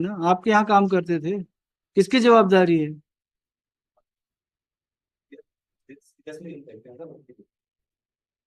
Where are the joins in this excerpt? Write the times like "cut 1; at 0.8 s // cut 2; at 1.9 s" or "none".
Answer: none